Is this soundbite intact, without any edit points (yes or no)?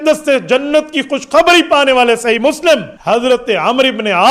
no